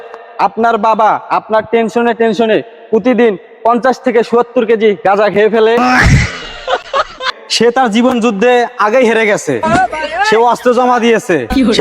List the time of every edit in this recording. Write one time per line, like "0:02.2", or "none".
0:07.4